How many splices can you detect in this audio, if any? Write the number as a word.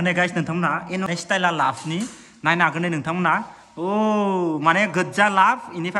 one